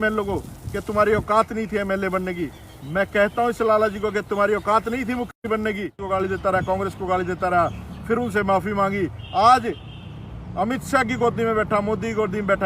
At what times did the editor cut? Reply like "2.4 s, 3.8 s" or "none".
5.9 s